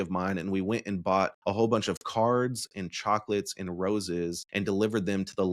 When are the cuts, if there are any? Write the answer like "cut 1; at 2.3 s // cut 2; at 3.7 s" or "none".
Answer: cut 1; at 1.4 s // cut 2; at 4.4 s